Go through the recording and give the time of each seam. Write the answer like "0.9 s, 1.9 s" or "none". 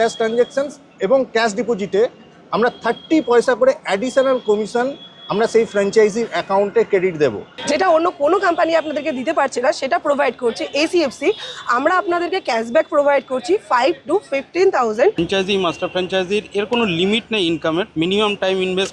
7.5 s, 15.2 s, 17.9 s